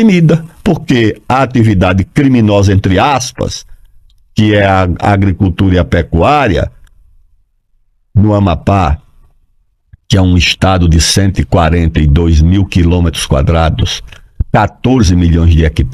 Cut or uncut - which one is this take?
uncut